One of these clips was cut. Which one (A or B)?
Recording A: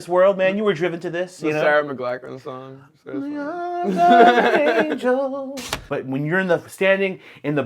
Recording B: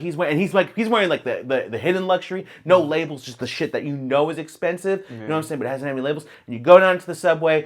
A